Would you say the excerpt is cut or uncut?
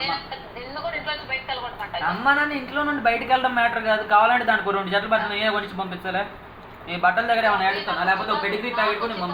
uncut